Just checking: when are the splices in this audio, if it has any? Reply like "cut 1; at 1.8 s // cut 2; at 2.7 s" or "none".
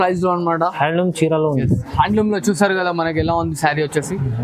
none